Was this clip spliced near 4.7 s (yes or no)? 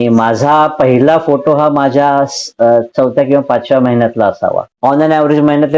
yes